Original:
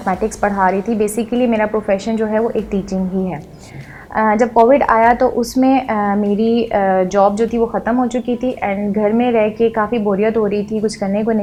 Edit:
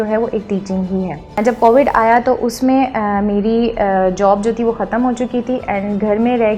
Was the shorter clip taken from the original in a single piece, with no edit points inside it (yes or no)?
no